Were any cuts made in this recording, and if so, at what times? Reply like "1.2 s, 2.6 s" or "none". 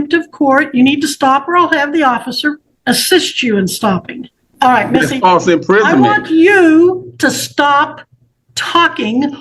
2.7 s, 4.4 s